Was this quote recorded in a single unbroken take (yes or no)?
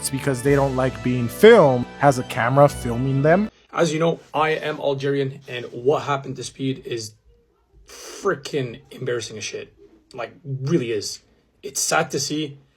no